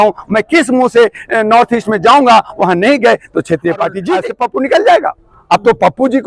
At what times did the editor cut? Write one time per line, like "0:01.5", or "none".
0:04.3